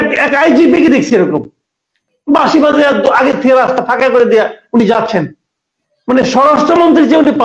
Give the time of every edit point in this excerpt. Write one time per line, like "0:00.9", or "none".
none